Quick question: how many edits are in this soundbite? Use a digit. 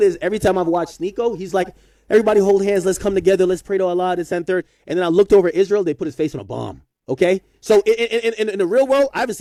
0